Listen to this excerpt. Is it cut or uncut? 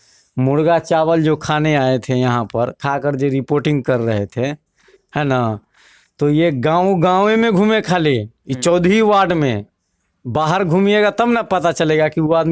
uncut